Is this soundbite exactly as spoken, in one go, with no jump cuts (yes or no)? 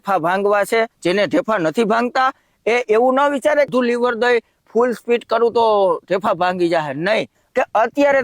no